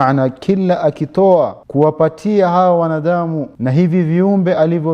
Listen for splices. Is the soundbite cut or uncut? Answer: cut